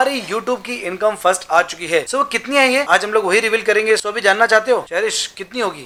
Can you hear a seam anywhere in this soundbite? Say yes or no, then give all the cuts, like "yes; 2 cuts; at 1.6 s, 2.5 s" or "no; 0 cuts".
no; 0 cuts